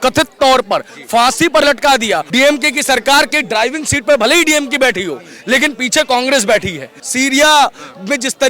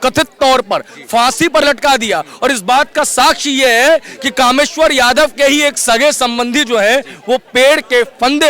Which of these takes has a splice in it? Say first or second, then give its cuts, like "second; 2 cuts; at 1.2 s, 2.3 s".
first; 2 cuts; at 2.3 s, 7.0 s